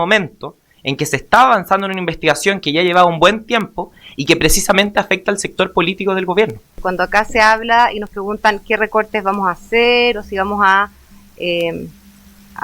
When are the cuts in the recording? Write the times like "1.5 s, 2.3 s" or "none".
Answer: 6.7 s